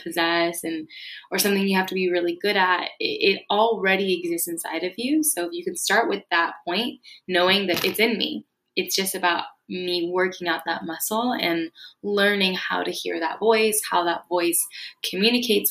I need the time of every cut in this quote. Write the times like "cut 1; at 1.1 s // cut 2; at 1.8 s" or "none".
none